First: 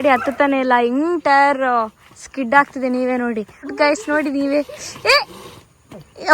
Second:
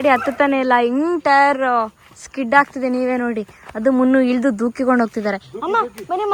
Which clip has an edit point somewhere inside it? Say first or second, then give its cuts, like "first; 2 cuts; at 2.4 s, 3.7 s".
first; 1 cut; at 3.7 s